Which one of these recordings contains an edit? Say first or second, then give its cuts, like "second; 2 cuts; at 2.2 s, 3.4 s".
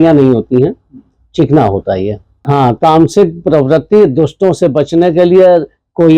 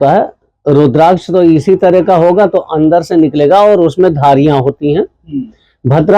first; 1 cut; at 2.4 s